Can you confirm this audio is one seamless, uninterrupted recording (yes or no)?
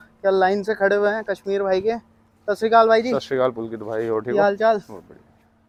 yes